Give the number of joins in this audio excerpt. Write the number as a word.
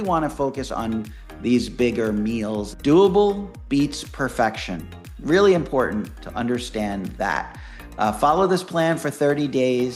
one